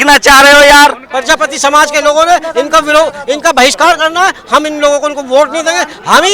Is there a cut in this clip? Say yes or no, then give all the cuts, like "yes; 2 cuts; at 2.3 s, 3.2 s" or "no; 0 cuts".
yes; 1 cut; at 1.1 s